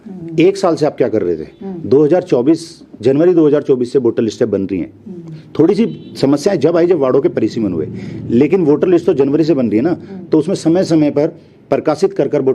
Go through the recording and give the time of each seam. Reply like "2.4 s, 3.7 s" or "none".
none